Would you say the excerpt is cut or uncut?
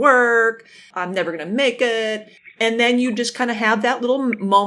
cut